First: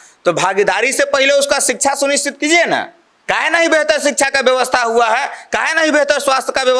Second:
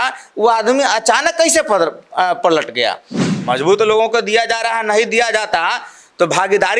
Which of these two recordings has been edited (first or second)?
second